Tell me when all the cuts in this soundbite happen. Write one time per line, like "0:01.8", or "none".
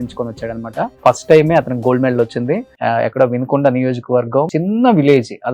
0:00.9
0:02.7
0:04.5